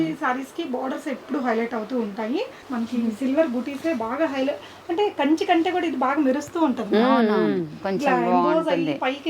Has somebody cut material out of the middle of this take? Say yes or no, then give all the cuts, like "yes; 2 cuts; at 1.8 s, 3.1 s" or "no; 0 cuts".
yes; 1 cut; at 2.6 s